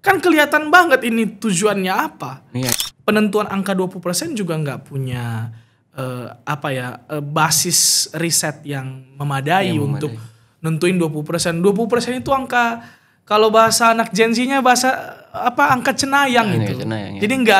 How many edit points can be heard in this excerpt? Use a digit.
1